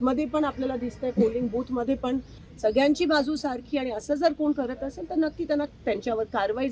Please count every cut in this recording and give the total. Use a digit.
1